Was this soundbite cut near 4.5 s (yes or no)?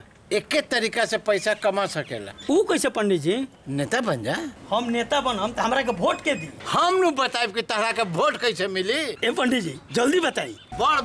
yes